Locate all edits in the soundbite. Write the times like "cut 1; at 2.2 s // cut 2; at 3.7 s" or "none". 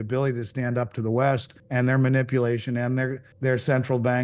cut 1; at 1.6 s // cut 2; at 3.2 s